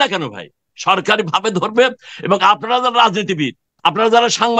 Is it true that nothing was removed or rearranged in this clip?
no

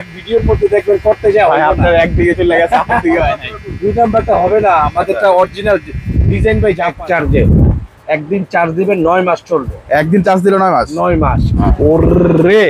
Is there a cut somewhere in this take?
yes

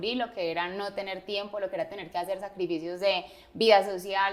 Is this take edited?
no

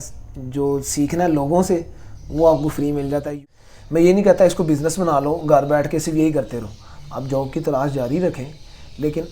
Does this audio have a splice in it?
yes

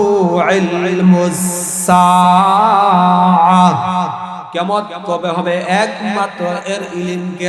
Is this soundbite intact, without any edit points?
no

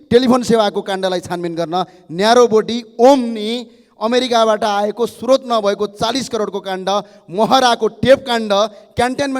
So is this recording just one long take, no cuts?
yes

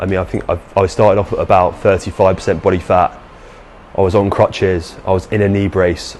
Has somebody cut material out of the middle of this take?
no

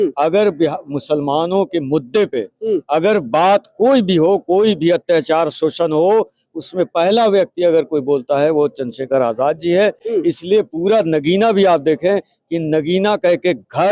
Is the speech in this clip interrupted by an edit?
no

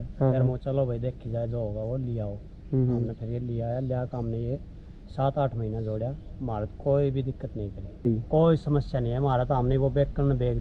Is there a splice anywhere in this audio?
yes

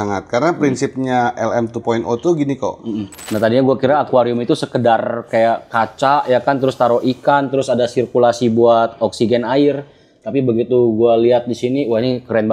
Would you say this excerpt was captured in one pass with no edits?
no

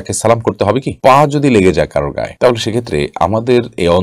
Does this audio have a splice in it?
no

